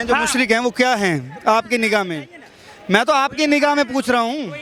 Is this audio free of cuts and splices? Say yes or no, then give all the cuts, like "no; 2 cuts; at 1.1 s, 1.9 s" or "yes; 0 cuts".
yes; 0 cuts